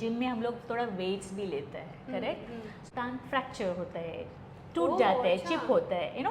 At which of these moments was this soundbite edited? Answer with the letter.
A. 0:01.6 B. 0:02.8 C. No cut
B